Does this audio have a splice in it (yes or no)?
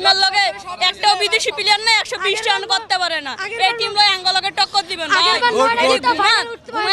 no